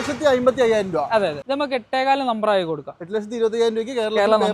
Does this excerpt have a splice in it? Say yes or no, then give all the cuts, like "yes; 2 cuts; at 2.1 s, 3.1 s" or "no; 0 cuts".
yes; 1 cut; at 1.4 s